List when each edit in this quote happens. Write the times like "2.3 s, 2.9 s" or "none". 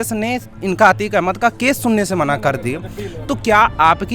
none